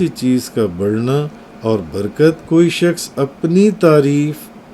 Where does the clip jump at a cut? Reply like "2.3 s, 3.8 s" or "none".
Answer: 2.5 s